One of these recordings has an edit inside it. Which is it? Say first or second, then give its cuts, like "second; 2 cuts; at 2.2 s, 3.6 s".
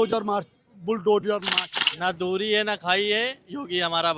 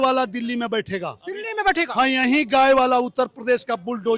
first; 1 cut; at 1.6 s